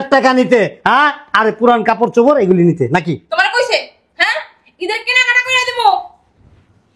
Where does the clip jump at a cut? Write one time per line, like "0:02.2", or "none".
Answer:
none